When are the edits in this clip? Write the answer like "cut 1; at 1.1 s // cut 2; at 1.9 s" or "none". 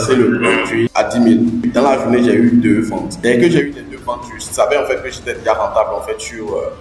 cut 1; at 0.9 s // cut 2; at 1.7 s // cut 3; at 3.1 s